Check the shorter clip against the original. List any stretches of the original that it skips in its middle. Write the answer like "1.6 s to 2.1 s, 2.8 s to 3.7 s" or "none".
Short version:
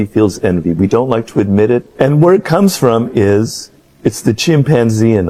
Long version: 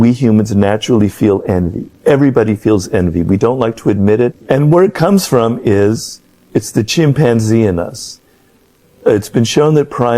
none